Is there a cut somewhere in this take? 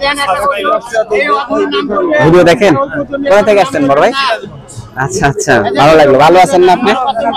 no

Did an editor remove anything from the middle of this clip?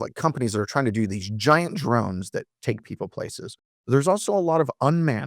yes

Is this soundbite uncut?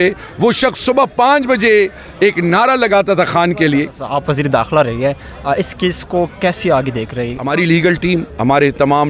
no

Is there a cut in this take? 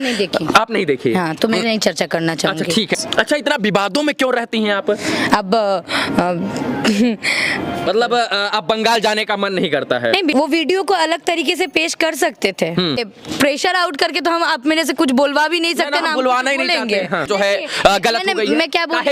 yes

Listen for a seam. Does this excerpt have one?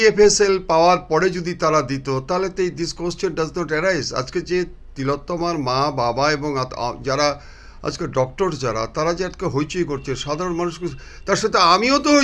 no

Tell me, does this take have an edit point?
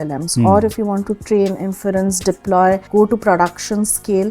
yes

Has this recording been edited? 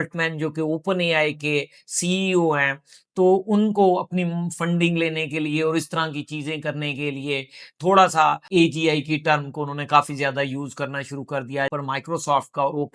yes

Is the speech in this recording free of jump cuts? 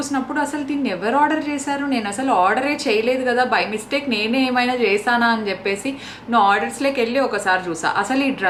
yes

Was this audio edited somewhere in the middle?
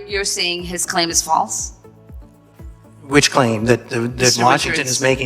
yes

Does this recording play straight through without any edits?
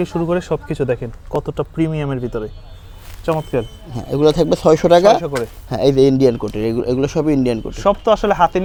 yes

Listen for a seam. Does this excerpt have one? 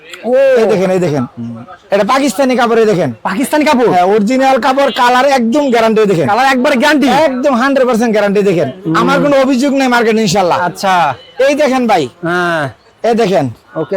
no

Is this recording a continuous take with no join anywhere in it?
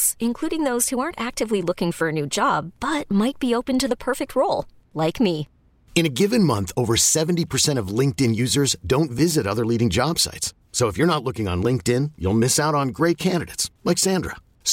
yes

